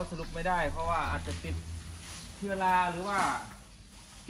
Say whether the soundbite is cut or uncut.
uncut